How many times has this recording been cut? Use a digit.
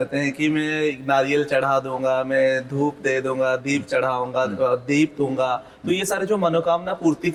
0